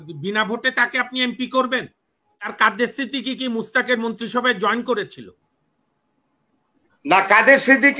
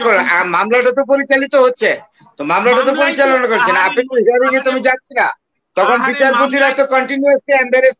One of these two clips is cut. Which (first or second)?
first